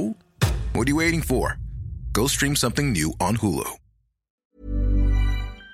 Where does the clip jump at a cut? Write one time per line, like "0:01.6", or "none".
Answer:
0:04.5

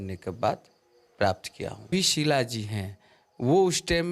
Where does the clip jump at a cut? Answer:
0:01.9

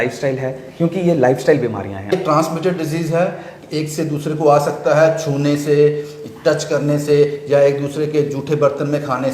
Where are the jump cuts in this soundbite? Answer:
0:02.1

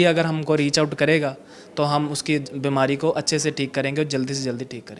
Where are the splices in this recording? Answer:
none

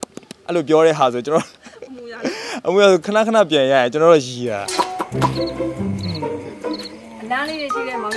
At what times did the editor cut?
0:04.7

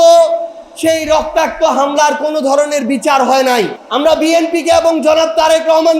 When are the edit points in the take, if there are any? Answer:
0:03.8

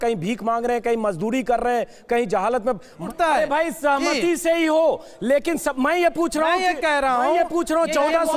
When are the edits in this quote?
0:03.0

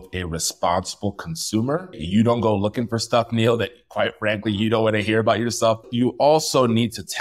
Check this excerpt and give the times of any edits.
0:02.0
0:05.9

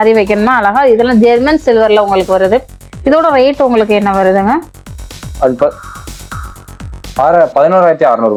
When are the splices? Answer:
none

